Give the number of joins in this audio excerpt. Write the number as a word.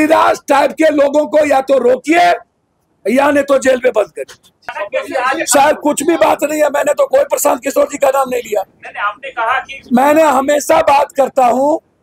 one